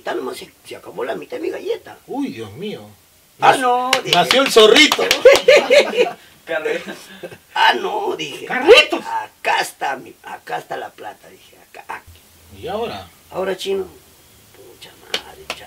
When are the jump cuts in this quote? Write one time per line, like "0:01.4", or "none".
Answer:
0:12.1